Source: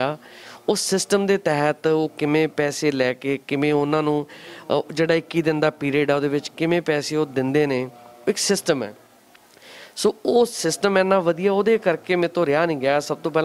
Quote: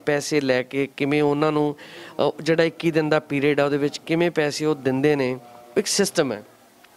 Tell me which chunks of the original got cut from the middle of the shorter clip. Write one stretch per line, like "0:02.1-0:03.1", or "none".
none